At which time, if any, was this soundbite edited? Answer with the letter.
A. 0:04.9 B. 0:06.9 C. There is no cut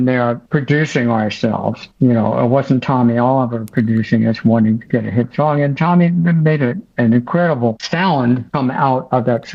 C